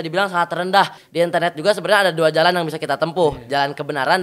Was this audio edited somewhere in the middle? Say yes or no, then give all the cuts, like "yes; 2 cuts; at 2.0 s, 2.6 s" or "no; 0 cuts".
yes; 1 cut; at 1.0 s